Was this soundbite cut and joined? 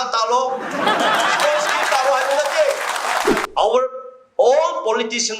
yes; 1 cut; at 3.4 s

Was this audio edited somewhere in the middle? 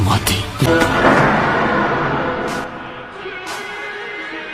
yes; 1 cut; at 2.6 s

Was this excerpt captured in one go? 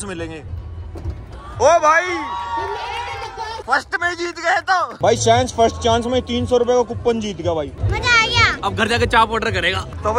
yes; 0 cuts

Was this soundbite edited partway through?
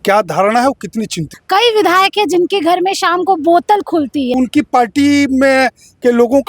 yes; 2 cuts; at 1.3 s, 4.3 s

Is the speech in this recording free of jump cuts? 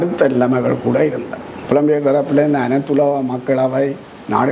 no; 1 cut; at 1.6 s

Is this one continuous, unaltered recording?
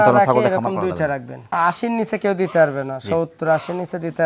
no; 1 cut; at 1.5 s

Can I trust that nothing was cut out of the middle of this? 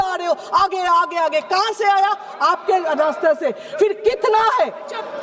yes; 0 cuts

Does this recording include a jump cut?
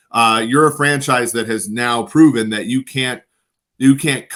no; 0 cuts

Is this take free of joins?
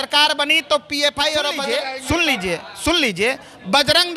no; 1 cut; at 1.7 s

